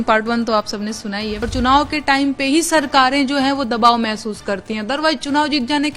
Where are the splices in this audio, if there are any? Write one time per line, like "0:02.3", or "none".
0:01.5